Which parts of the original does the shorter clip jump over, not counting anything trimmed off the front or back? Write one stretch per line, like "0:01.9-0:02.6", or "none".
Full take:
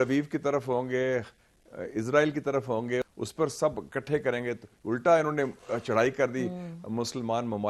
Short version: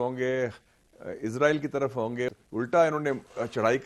0:03.1-0:04.7